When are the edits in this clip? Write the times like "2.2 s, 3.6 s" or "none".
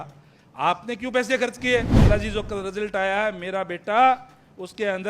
1.9 s